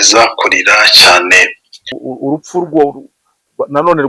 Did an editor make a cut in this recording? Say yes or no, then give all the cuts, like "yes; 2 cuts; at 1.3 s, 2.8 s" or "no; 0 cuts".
yes; 1 cut; at 2.0 s